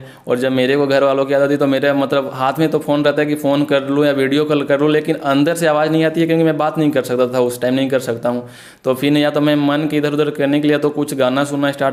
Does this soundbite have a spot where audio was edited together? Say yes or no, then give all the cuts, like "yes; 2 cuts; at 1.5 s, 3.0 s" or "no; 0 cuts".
no; 0 cuts